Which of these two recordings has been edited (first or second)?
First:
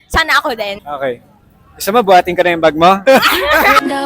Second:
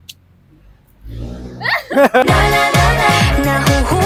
first